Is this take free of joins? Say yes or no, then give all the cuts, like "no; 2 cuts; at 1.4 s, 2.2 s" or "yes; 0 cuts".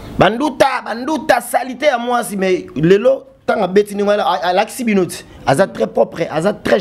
yes; 0 cuts